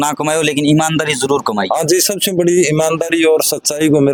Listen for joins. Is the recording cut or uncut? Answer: uncut